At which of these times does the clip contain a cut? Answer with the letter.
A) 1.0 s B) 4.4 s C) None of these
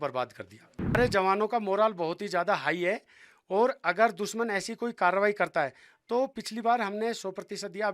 A